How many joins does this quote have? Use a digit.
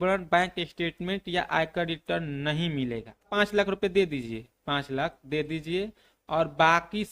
1